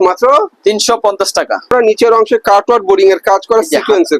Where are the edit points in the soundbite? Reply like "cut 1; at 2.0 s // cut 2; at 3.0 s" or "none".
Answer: cut 1; at 1.7 s